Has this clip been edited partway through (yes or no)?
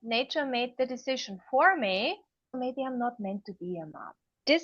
yes